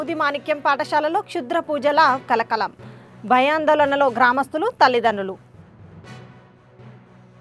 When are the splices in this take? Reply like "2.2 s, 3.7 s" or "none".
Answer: none